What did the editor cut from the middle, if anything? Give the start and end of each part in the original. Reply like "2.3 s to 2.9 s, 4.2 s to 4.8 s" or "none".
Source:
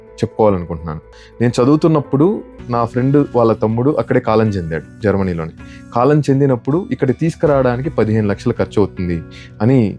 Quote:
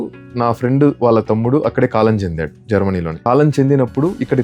5.5 s to 5.8 s